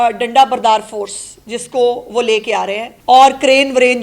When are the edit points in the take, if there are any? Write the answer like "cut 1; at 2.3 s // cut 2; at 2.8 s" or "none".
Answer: cut 1; at 2.9 s